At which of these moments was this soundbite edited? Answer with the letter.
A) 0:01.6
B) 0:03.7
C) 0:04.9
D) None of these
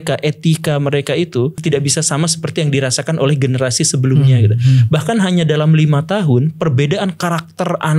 A